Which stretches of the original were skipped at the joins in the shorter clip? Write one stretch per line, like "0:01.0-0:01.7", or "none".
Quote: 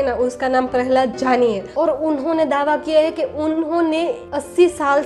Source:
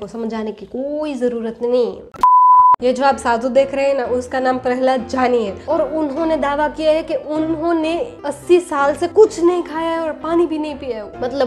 none